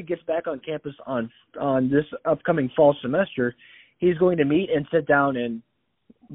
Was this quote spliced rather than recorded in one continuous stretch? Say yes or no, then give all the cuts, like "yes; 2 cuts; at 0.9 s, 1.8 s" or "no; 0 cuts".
no; 0 cuts